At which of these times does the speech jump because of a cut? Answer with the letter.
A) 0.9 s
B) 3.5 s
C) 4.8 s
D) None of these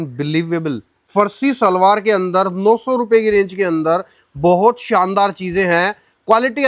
A